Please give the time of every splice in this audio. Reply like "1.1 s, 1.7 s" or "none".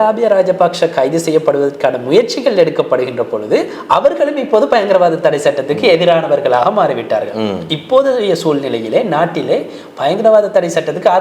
none